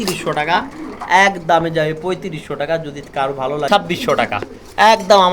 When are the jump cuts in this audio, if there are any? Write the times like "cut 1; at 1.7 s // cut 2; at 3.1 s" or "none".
cut 1; at 3.7 s